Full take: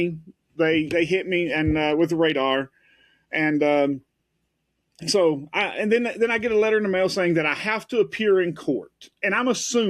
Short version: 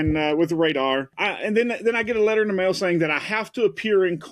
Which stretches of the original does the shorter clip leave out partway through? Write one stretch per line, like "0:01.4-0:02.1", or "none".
0:02.8-0:05.6